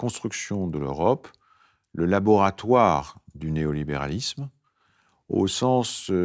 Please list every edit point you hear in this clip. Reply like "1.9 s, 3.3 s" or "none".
none